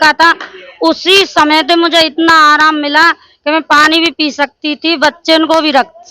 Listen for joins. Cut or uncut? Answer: uncut